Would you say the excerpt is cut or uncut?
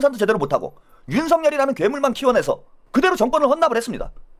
uncut